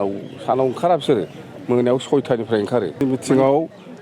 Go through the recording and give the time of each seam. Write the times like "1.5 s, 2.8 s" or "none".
3.0 s